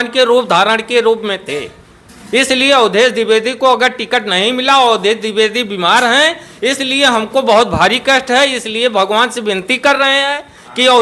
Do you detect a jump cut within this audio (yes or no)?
no